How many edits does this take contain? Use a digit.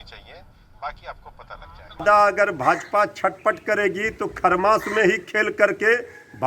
1